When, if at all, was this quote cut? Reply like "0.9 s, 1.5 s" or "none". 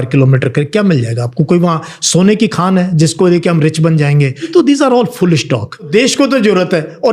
4.4 s, 5.9 s